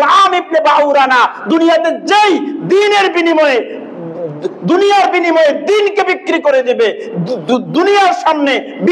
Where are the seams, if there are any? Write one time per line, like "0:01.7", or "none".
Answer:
none